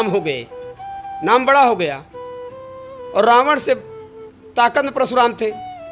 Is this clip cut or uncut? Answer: uncut